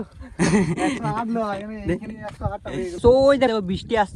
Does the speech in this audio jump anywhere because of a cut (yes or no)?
yes